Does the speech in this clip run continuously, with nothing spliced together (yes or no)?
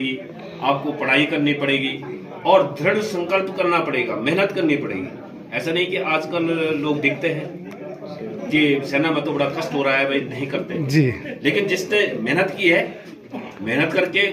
yes